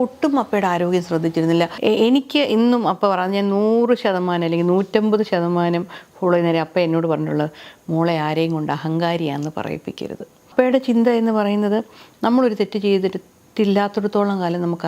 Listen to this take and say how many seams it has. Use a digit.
2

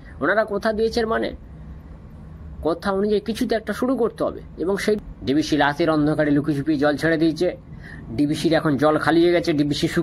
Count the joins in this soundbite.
1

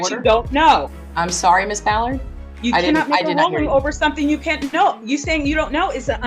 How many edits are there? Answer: 0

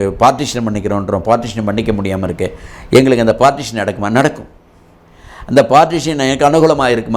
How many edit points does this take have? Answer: 0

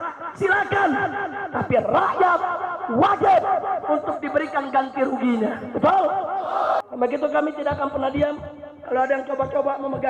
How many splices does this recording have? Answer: 1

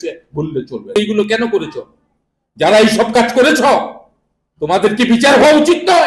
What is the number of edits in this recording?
1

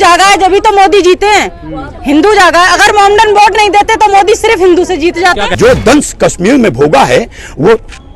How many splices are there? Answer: 1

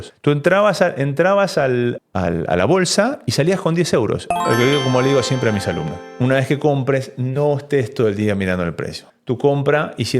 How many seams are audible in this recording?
1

